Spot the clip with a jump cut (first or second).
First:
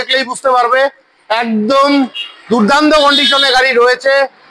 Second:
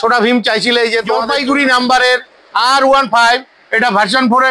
second